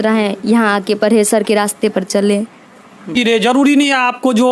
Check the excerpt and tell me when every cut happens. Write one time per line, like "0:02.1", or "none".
0:03.1